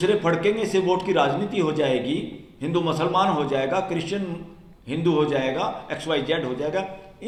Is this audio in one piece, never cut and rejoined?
yes; 0 cuts

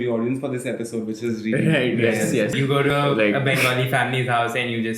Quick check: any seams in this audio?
yes; 1 cut; at 2.8 s

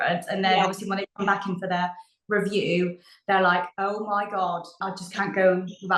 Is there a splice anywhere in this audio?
yes; 1 cut; at 4.7 s

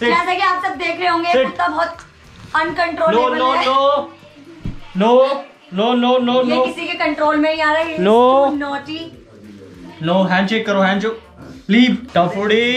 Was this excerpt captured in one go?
yes; 0 cuts

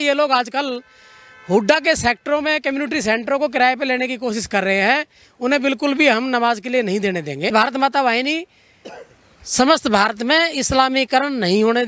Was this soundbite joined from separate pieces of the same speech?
yes; 1 cut; at 7.5 s

